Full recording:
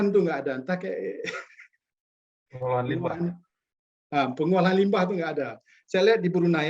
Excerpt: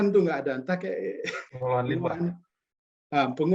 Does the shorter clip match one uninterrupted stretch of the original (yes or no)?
no